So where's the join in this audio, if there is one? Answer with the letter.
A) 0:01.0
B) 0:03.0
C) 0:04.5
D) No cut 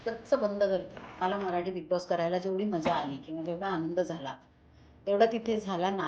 A